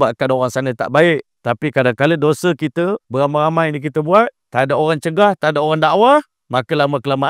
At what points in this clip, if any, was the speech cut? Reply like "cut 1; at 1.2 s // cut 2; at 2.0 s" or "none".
cut 1; at 1.3 s // cut 2; at 3.0 s // cut 3; at 4.4 s // cut 4; at 6.4 s